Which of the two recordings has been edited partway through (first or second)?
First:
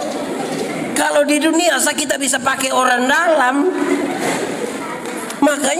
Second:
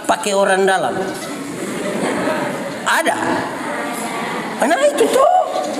first